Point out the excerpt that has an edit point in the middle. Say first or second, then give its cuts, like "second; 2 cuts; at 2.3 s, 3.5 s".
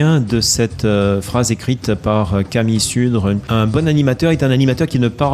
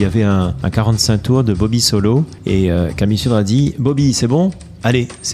first; 1 cut; at 3.4 s